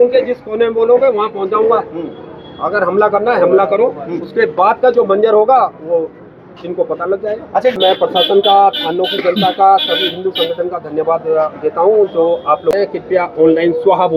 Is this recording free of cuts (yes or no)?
no